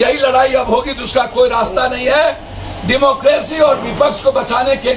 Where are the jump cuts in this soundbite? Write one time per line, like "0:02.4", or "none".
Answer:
none